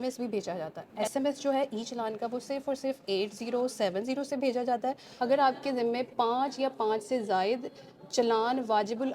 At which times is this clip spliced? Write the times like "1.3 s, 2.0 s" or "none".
1.0 s, 5.1 s